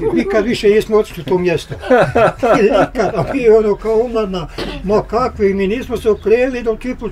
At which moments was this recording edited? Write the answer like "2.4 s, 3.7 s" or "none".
none